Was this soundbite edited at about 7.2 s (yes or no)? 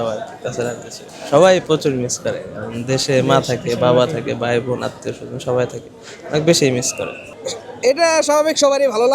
yes